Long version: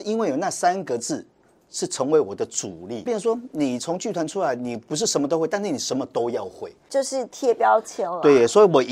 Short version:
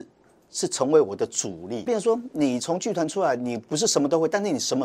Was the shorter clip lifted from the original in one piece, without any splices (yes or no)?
yes